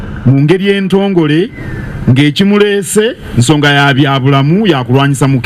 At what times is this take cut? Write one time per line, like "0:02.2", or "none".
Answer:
none